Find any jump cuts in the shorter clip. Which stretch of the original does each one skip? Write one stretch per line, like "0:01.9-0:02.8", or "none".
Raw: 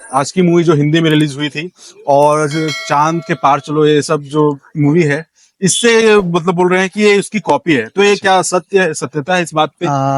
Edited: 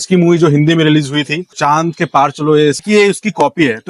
0:01.7-0:02.8
0:04.1-0:06.9